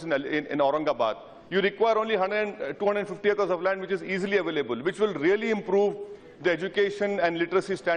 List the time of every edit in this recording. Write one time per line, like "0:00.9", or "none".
0:06.0

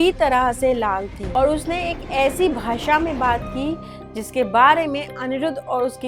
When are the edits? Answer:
0:01.1

